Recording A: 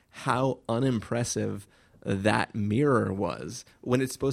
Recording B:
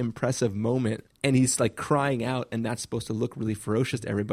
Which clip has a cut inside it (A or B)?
B